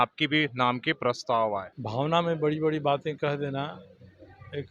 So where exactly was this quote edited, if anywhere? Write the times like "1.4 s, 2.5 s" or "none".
1.8 s

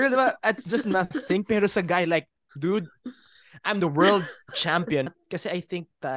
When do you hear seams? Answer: 5.1 s

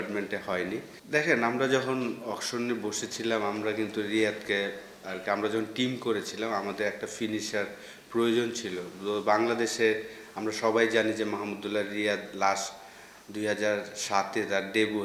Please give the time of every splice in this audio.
0.9 s

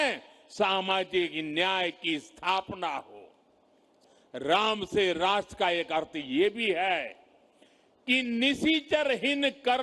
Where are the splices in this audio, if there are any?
3.9 s

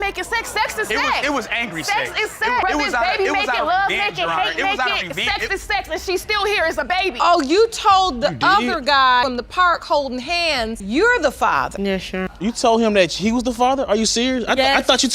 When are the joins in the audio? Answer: 7.2 s, 9.2 s, 12.3 s

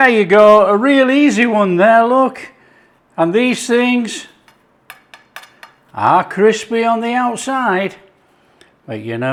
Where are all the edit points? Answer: none

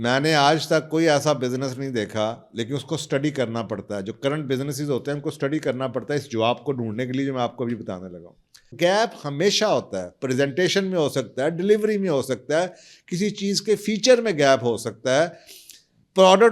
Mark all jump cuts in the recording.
8.7 s

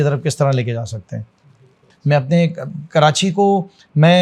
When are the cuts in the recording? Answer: 1.9 s

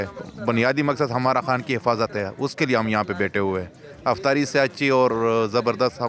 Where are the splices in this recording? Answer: none

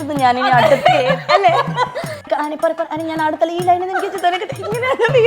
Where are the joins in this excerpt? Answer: 2.2 s

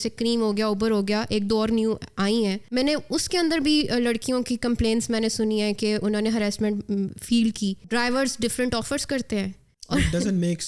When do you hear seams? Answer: 2.6 s, 7.8 s, 9.7 s

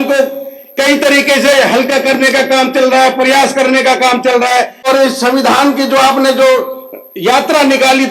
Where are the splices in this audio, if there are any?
4.8 s

